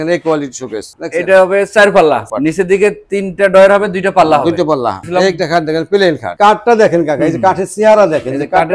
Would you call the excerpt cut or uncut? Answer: cut